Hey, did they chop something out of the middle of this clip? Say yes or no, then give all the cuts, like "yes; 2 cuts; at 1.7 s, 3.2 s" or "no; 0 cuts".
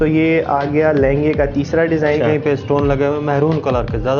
yes; 1 cut; at 2.2 s